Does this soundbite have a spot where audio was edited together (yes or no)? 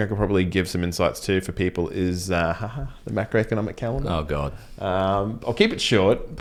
no